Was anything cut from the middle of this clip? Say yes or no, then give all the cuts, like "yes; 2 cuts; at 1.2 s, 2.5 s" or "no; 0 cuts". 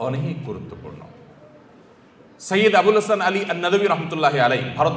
no; 0 cuts